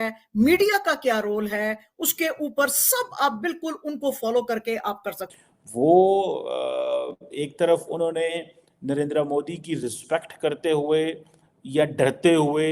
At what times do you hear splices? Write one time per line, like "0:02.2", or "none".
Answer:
0:05.2